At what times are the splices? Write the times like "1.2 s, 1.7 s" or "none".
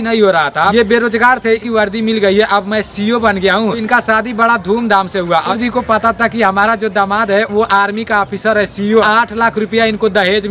0.7 s, 1.6 s, 3.8 s, 5.5 s, 9.0 s